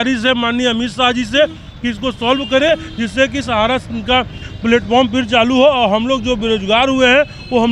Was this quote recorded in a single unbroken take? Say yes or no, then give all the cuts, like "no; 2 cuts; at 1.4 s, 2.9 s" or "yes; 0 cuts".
yes; 0 cuts